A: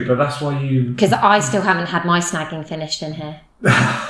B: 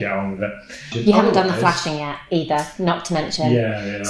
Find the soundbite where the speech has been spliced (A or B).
B